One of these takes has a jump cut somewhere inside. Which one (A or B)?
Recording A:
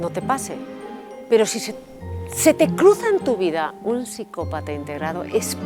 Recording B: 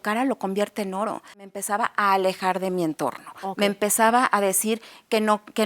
B